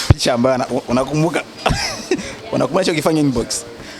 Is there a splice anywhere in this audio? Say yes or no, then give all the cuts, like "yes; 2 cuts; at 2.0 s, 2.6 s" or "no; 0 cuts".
no; 0 cuts